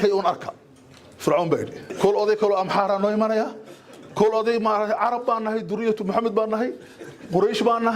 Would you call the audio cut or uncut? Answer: cut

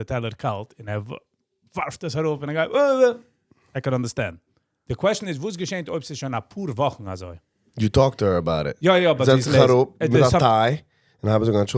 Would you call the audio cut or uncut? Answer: uncut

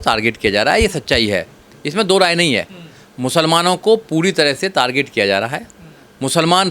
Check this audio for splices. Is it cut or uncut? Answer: uncut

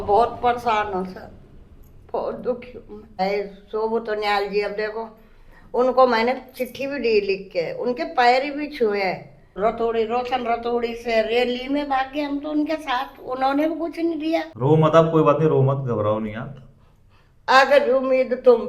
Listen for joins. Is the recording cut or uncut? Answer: cut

